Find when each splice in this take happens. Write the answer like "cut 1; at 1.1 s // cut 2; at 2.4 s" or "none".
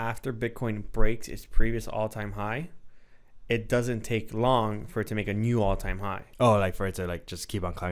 cut 1; at 6.2 s